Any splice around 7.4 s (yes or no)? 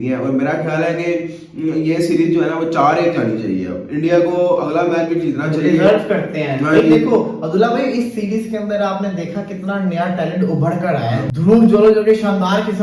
no